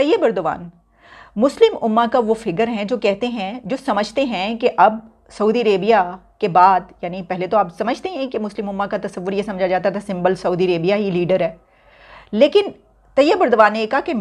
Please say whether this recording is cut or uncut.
uncut